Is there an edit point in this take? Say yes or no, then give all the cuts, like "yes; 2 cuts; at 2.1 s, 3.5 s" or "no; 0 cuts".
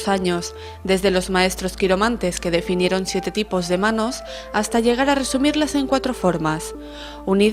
yes; 1 cut; at 1.7 s